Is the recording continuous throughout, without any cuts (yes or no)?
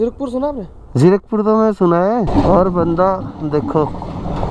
no